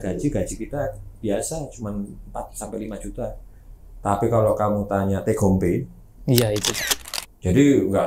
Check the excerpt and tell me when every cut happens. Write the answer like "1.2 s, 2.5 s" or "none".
6.7 s